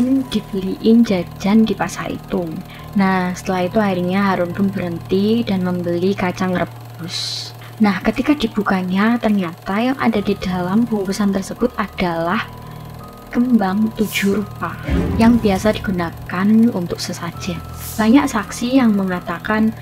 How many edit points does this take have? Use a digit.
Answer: 1